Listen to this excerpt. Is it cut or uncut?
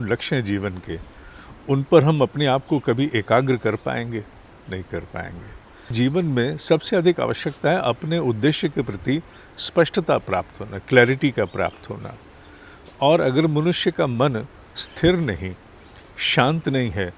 cut